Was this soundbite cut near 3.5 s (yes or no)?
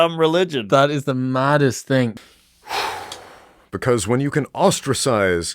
no